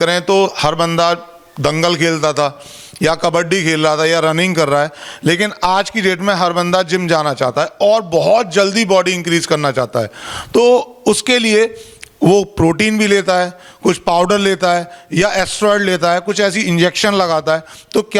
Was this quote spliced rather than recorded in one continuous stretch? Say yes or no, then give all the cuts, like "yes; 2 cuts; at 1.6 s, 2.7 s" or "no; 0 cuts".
no; 0 cuts